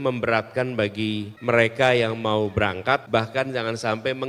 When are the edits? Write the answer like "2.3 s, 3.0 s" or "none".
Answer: 1.3 s, 3.0 s